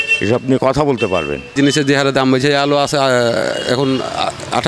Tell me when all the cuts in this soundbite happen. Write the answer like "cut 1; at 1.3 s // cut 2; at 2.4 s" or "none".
cut 1; at 1.5 s